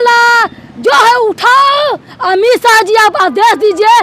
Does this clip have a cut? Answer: no; 0 cuts

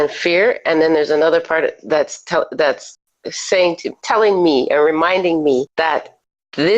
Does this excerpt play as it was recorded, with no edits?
no; 1 cut; at 5.7 s

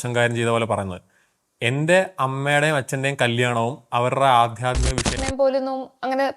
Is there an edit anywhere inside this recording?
yes; 1 cut; at 5.2 s

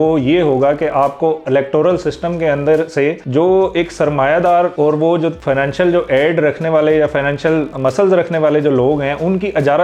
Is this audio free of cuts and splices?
no; 2 cuts; at 5.0 s, 7.7 s

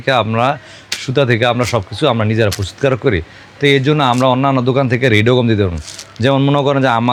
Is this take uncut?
yes; 0 cuts

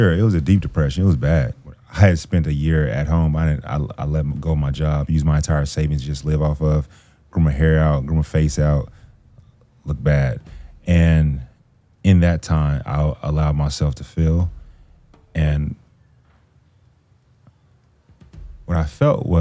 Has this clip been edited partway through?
yes; 1 cut; at 1.7 s

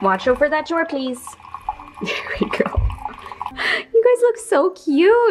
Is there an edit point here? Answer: yes; 1 cut; at 3.5 s

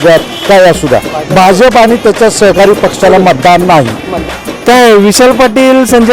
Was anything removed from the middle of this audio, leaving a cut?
yes; 1 cut; at 4.1 s

